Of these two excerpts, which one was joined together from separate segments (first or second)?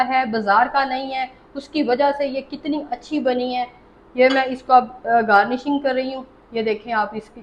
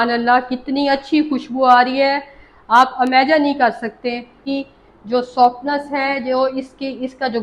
second